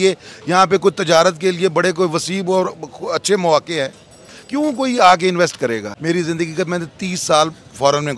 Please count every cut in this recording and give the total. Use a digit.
1